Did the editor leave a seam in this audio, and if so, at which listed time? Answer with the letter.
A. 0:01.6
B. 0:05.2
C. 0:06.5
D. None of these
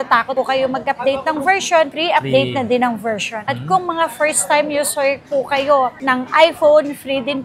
D